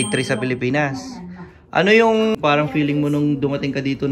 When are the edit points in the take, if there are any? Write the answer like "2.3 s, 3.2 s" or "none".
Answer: 2.4 s